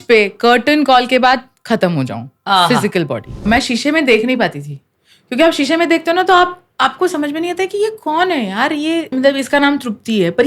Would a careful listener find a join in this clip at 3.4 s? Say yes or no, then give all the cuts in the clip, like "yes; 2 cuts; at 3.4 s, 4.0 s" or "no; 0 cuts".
yes; 2 cuts; at 3.4 s, 9.1 s